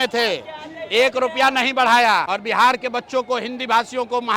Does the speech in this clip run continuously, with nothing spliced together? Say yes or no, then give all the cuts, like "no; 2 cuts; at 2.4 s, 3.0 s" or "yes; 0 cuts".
no; 1 cut; at 2.3 s